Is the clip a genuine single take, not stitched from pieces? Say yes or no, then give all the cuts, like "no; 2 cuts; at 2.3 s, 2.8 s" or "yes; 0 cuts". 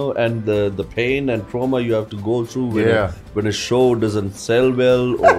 yes; 0 cuts